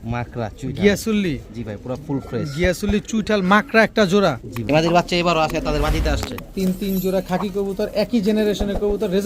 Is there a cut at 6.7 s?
no; 1 cut; at 4.6 s

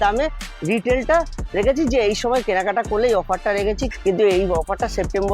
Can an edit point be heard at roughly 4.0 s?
no; 0 cuts

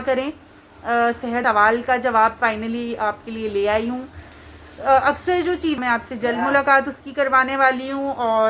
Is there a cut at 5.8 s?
yes; 2 cuts; at 1.4 s, 5.8 s

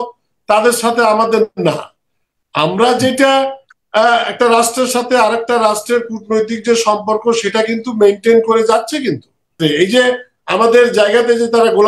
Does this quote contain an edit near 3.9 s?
no; 1 cut; at 9.6 s

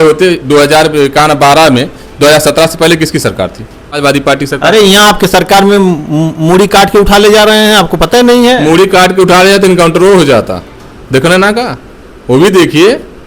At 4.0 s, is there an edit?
yes; 1 cut; at 4.0 s

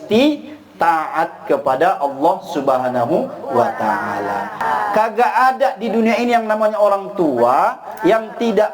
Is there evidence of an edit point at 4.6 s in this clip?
yes; 1 cut; at 4.6 s

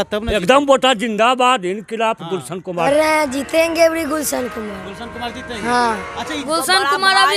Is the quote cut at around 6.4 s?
yes; 2 cuts; at 2.8 s, 6.4 s

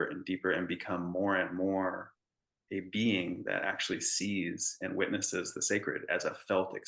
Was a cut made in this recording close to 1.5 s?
no; 0 cuts

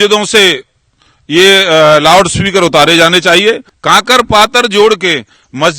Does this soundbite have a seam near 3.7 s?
yes; 1 cut; at 3.7 s

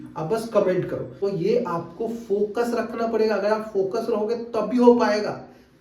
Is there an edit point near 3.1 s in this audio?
no; 1 cut; at 1.1 s

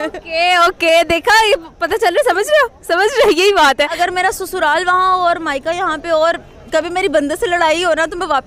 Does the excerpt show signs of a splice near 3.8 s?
no; 0 cuts

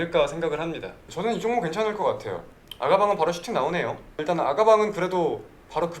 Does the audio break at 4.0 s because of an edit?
no; 1 cut; at 2.5 s

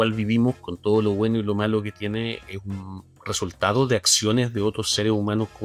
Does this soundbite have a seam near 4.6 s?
no; 0 cuts

